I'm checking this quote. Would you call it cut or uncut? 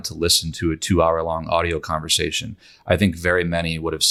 uncut